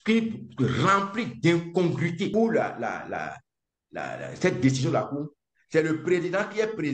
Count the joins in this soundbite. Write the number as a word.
one